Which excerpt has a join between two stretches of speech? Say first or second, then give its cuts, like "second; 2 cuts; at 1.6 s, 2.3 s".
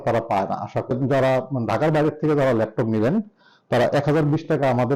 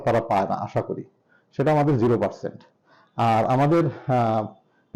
first; 1 cut; at 0.9 s